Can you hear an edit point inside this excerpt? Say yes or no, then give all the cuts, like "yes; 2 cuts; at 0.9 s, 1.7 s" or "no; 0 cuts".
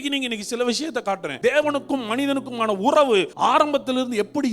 yes; 2 cuts; at 1.3 s, 3.3 s